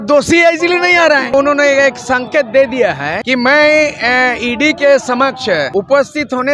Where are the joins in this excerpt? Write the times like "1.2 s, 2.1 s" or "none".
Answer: 1.3 s, 3.1 s, 5.7 s